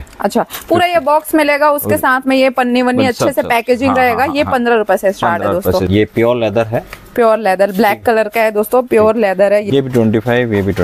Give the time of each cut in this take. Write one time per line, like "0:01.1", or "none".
0:05.9
0:09.6